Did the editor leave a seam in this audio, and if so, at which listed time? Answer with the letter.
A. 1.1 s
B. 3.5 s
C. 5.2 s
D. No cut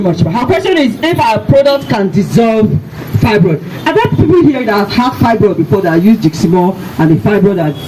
D